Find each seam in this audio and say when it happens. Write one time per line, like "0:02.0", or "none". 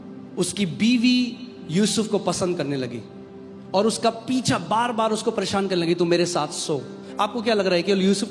none